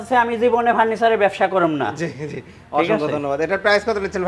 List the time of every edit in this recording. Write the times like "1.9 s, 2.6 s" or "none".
none